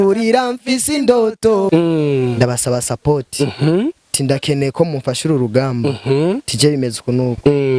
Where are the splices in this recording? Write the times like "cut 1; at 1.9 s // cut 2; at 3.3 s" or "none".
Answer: cut 1; at 1.7 s